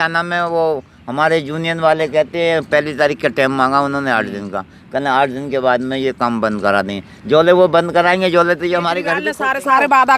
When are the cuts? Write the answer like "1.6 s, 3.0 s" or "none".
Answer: 9.3 s